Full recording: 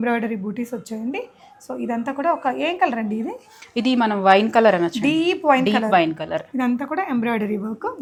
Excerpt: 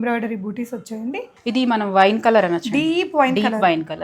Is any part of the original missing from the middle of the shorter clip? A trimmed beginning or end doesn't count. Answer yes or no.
yes